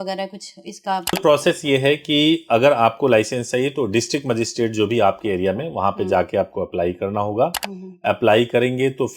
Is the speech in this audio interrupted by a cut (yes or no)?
yes